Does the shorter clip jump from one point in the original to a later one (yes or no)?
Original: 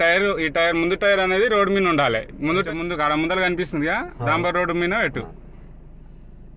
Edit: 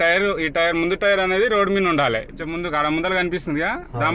yes